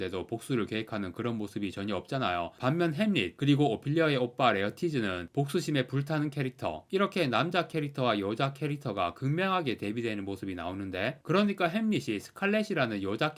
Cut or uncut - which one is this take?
cut